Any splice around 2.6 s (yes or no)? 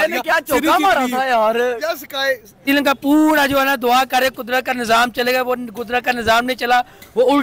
yes